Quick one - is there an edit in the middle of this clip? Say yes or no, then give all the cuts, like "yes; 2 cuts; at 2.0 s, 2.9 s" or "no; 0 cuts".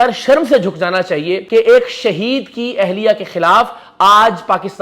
yes; 1 cut; at 1.4 s